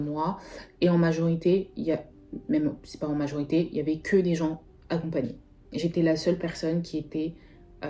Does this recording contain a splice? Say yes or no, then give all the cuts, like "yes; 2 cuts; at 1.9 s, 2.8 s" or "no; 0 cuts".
no; 0 cuts